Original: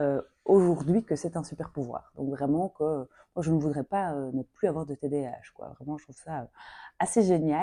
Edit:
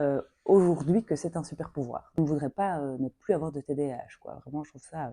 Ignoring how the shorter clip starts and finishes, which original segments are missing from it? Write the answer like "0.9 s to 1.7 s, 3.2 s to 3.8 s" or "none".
2.2 s to 3.5 s